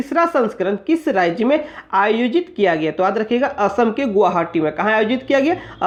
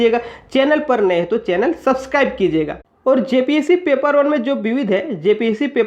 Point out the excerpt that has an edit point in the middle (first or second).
second